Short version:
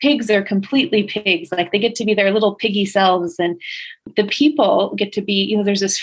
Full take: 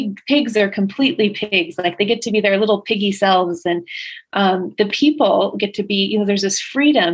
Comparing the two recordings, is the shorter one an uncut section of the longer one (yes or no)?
no